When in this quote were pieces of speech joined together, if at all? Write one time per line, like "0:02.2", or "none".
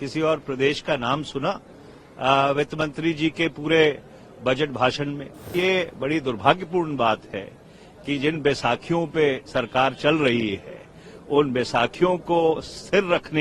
0:05.5